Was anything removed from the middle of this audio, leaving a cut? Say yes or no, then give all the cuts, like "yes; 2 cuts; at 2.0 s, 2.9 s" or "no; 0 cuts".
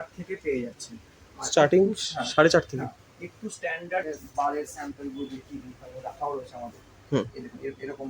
yes; 1 cut; at 4.0 s